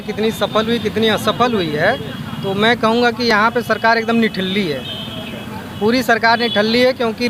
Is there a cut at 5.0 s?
no; 0 cuts

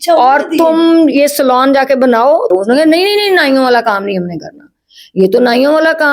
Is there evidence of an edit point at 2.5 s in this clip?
yes; 1 cut; at 2.5 s

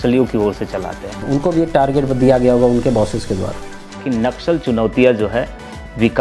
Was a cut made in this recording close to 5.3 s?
no; 2 cuts; at 1.1 s, 4.0 s

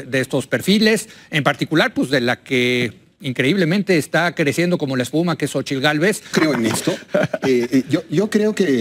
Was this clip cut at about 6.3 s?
yes; 1 cut; at 6.3 s

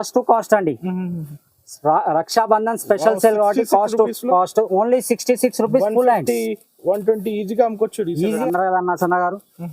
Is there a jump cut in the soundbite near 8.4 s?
yes; 1 cut; at 8.4 s

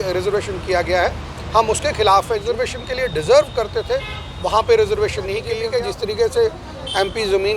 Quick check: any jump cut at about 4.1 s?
no; 2 cuts; at 2.4 s, 5.5 s

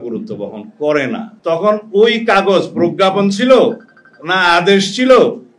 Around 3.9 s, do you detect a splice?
no; 1 cut; at 1.3 s

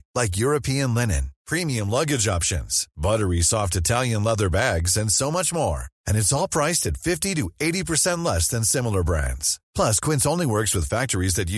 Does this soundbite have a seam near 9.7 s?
no; 0 cuts

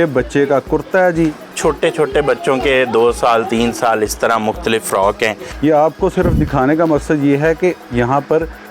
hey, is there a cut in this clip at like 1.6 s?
yes; 2 cuts; at 1.6 s, 5.5 s

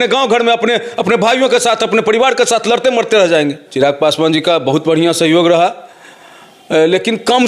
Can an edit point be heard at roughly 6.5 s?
no; 1 cut; at 3.6 s

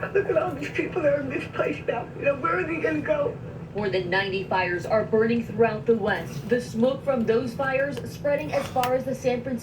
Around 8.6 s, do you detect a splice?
no; 1 cut; at 7.0 s

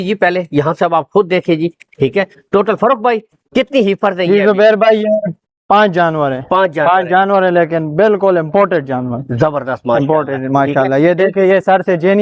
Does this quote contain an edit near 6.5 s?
no; 0 cuts

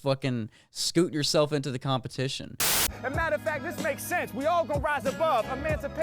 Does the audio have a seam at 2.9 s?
yes; 1 cut; at 2.9 s

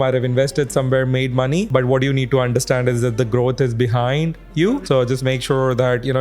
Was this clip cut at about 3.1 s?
no; 2 cuts; at 1.7 s, 4.8 s

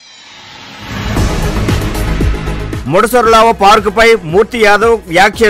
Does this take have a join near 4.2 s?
no; 1 cut; at 2.6 s

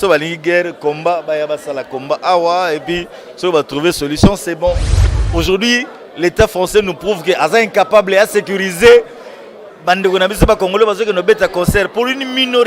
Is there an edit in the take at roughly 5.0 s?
yes; 1 cut; at 5.0 s

